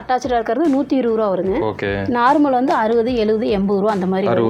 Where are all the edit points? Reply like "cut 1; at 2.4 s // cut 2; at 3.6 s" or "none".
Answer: none